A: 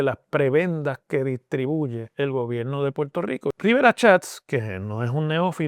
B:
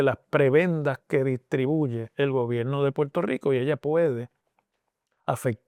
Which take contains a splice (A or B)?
A